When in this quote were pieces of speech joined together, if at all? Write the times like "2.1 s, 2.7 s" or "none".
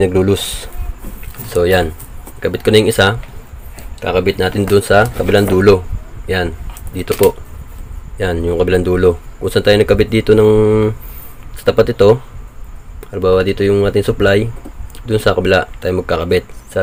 none